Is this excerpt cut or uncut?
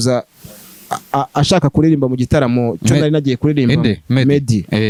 uncut